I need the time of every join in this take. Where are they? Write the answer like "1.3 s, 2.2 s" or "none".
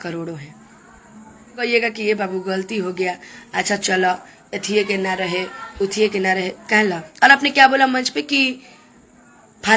1.6 s